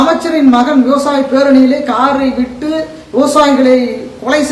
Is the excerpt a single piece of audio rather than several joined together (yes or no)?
yes